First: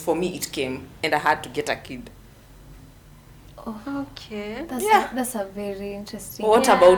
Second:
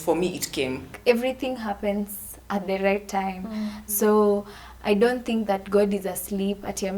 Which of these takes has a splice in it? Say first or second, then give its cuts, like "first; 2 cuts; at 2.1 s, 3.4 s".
second; 1 cut; at 0.9 s